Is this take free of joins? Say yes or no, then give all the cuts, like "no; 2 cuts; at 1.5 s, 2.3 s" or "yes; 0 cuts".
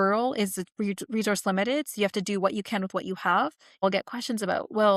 no; 1 cut; at 3.8 s